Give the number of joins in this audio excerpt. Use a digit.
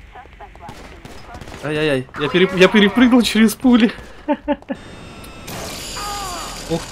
1